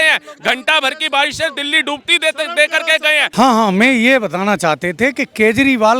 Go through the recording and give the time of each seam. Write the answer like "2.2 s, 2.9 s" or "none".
3.2 s

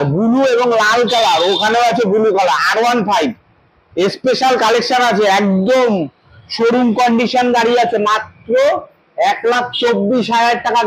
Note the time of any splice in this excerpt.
none

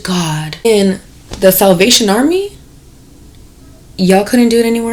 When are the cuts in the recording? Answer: none

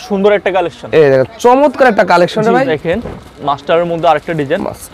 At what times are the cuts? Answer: 2.8 s

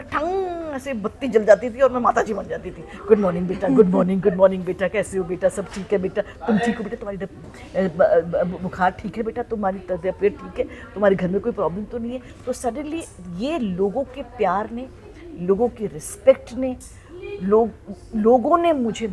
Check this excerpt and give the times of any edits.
none

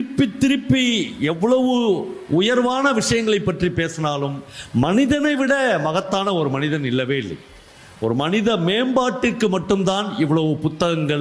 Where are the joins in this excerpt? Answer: none

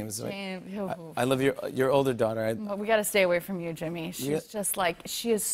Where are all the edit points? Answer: none

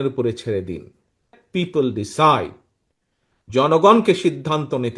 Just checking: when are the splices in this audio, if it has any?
1.3 s

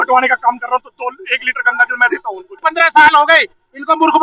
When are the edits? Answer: 2.6 s

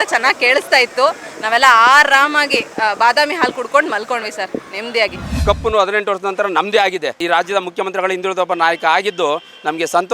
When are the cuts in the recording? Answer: 5.4 s, 7.2 s

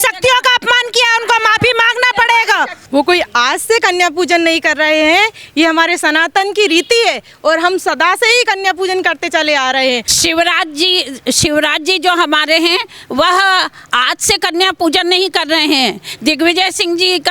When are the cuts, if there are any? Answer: 2.8 s, 10.1 s

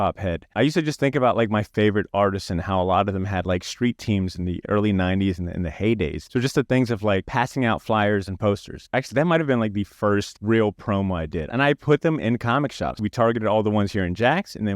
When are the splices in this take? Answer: 1.7 s, 4.6 s, 8.8 s, 11.5 s, 12.9 s

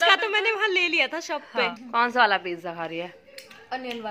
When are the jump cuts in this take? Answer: 1.8 s

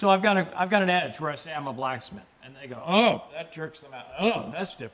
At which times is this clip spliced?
none

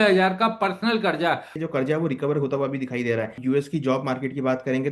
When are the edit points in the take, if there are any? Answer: 1.6 s, 3.4 s

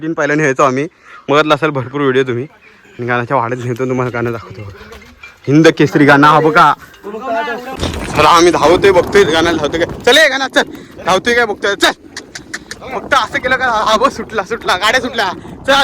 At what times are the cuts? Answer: 7.7 s

